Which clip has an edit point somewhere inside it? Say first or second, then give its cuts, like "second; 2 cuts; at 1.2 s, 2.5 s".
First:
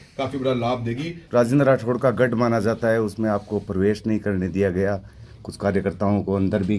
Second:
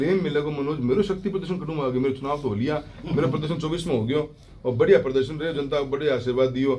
first; 1 cut; at 1.2 s